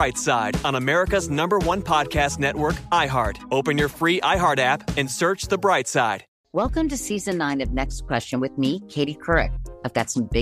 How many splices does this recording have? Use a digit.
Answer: 1